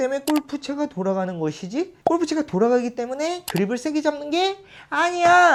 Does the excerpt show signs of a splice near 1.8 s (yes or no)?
no